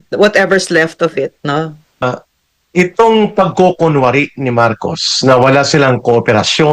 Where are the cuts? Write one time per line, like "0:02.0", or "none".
0:02.0